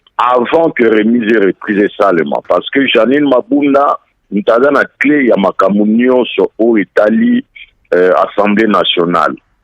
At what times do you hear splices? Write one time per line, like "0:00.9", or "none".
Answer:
none

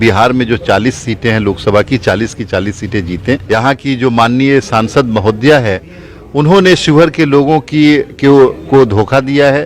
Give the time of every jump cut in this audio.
0:03.4

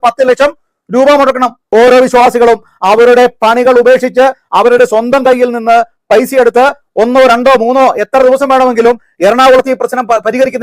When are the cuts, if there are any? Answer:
0:01.6

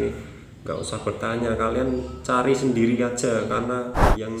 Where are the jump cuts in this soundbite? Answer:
none

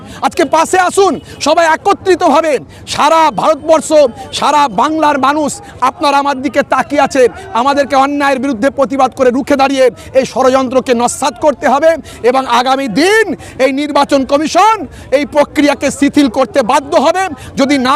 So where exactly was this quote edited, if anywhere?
none

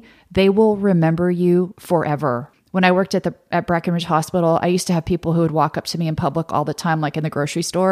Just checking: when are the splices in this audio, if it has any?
0:02.5

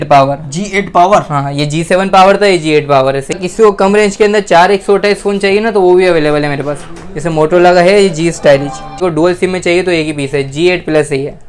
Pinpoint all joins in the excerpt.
0:03.4
0:08.9

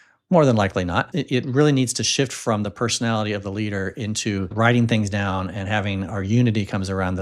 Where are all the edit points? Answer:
0:01.1

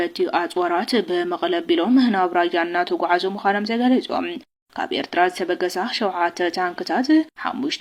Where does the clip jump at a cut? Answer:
none

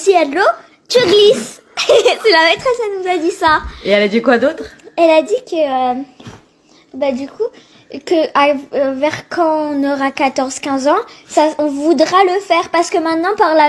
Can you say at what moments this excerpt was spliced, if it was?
none

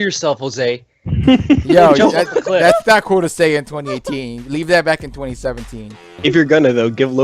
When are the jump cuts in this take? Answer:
0:06.0

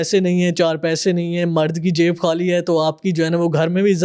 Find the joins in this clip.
none

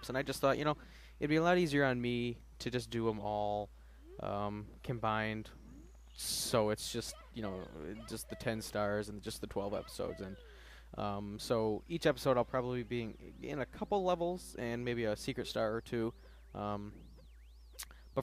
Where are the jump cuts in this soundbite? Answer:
0:03.2

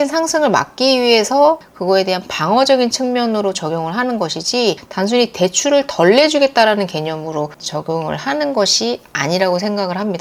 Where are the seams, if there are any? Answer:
none

